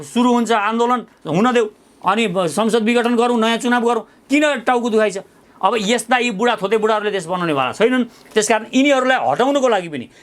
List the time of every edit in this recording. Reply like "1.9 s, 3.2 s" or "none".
5.4 s

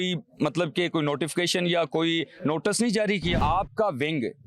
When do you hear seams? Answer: 3.4 s

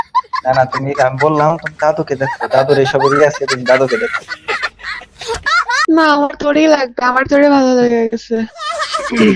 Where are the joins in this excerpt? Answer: none

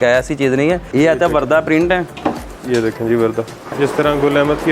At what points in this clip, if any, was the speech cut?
0.9 s, 2.5 s, 3.8 s

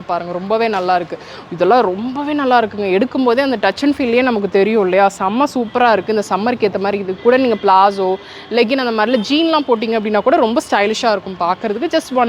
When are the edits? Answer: none

